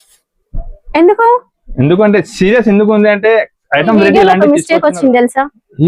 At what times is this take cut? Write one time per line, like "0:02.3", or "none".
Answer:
0:04.2